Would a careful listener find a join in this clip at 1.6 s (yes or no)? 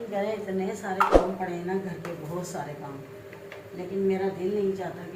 no